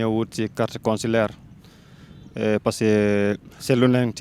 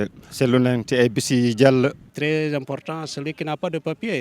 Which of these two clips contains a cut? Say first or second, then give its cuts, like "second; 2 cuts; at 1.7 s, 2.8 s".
second; 1 cut; at 2.1 s